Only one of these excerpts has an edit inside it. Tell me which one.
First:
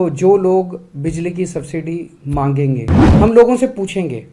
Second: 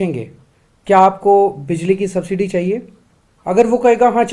first; 1 cut; at 3.0 s

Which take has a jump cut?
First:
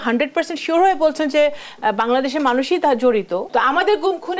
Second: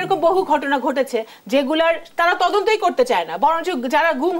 first; 1 cut; at 3.5 s

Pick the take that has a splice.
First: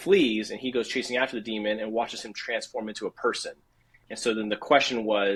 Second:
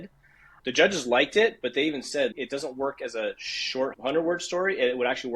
second; 2 cuts; at 2.3 s, 3.9 s

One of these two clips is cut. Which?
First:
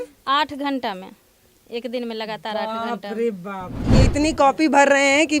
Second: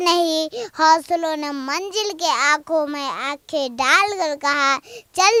first; 1 cut; at 3.9 s

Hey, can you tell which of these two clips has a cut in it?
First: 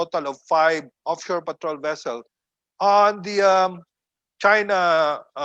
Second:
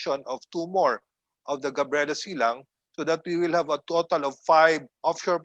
first; 1 cut; at 2.4 s

